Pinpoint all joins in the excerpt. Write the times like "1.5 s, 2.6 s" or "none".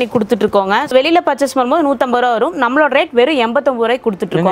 0.9 s